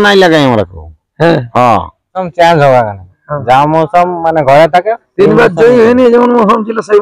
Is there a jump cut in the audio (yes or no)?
yes